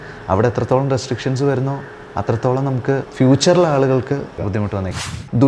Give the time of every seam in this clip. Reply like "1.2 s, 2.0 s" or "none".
3.1 s, 4.6 s

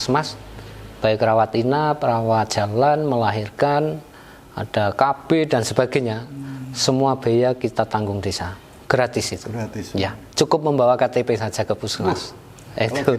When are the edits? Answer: none

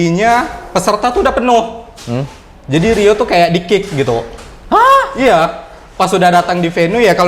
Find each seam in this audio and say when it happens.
none

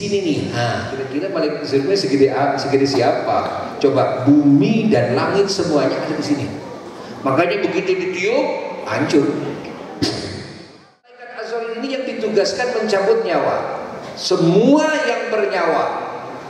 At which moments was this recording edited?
1.1 s, 11.4 s

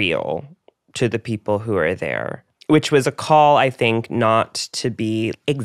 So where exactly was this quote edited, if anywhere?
none

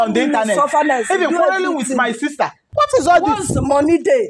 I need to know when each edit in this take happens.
2.6 s

